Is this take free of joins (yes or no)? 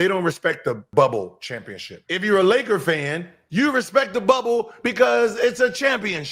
no